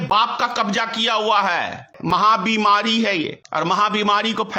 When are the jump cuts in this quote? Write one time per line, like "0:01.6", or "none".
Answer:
0:02.0
0:03.4